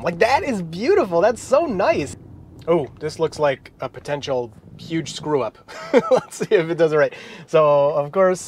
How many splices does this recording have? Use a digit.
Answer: 1